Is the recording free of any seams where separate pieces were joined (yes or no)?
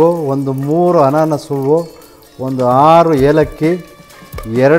yes